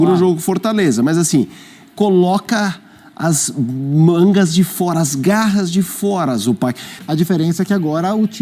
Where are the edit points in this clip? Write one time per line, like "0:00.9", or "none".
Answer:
0:06.9